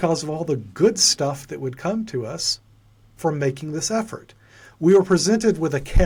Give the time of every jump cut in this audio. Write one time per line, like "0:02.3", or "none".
none